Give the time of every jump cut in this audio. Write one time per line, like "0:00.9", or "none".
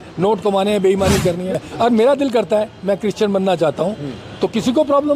0:01.6